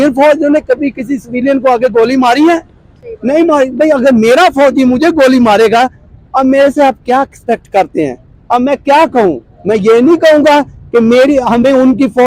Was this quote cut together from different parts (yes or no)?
no